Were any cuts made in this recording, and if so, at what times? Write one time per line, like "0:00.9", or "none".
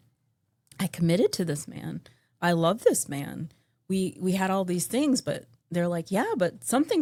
none